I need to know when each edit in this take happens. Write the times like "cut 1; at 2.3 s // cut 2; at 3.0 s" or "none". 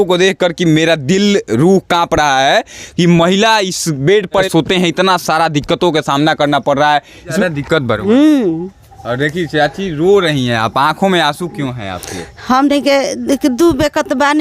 cut 1; at 4.5 s // cut 2; at 7.4 s